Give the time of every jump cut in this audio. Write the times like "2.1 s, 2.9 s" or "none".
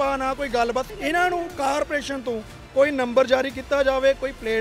0.9 s